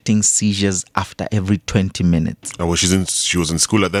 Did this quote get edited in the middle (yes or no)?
no